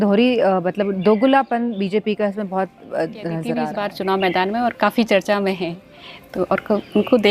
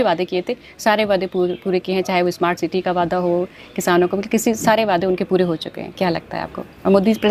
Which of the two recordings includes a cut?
first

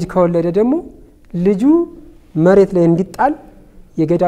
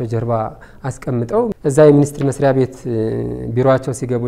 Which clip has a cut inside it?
second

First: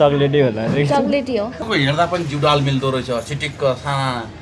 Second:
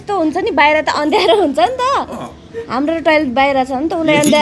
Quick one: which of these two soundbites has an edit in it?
first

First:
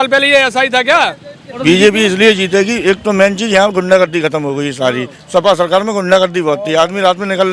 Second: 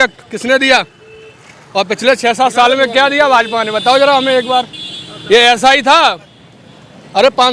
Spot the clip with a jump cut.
first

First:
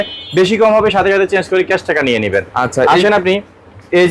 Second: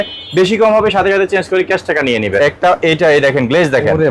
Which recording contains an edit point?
second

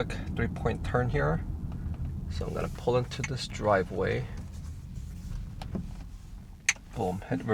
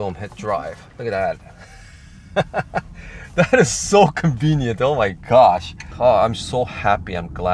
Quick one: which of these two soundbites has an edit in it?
second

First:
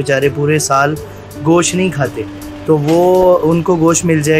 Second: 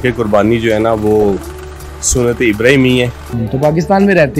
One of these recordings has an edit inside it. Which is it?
second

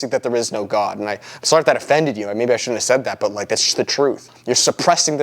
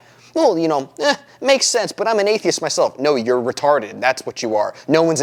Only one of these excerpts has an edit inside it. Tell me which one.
first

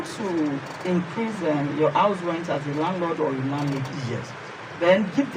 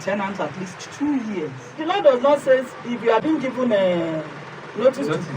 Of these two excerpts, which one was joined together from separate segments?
second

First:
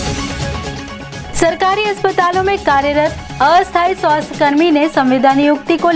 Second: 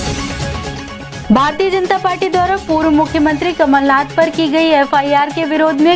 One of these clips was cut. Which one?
second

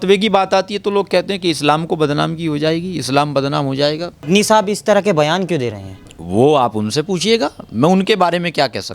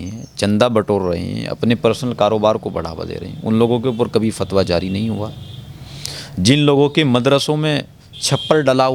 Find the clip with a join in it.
first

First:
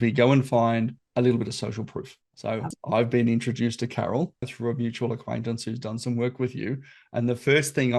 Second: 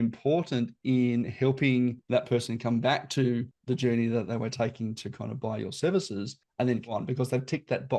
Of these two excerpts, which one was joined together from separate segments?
second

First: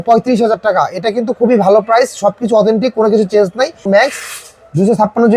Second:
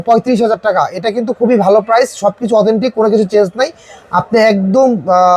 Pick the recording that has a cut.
first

